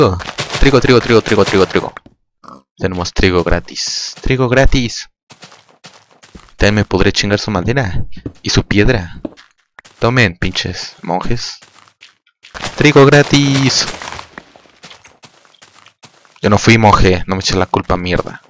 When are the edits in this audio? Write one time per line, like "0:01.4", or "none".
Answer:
0:14.2